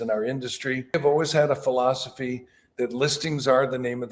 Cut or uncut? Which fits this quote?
cut